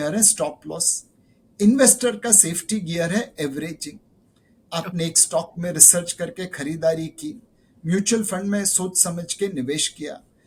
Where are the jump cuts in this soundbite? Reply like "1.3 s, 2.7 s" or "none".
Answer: none

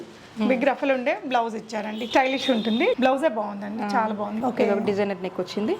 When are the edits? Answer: 3.0 s, 4.3 s

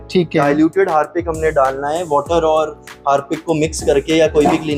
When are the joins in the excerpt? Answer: none

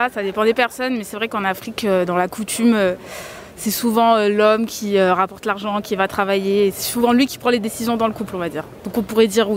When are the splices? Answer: none

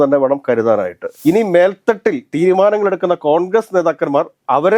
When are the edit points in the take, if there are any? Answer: 1.1 s

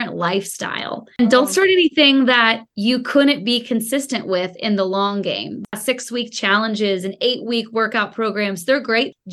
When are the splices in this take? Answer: none

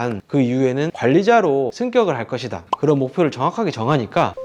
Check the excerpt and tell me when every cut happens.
none

